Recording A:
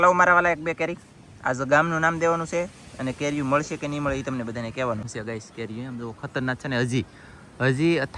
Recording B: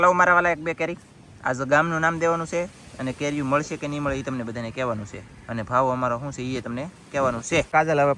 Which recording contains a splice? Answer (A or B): A